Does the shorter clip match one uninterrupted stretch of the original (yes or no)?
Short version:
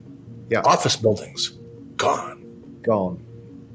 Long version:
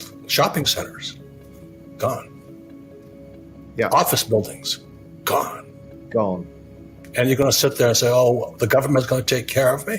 yes